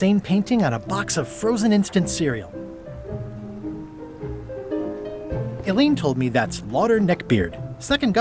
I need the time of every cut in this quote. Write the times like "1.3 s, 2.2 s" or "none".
2.5 s, 5.6 s